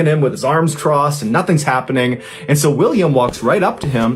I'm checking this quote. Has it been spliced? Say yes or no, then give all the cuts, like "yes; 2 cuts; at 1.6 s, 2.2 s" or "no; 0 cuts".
no; 0 cuts